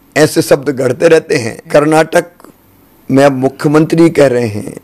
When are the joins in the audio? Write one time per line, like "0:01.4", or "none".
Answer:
0:01.6